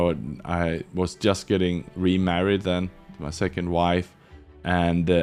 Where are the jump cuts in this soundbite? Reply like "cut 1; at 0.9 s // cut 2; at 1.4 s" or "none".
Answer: none